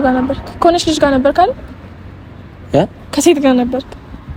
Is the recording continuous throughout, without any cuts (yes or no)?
yes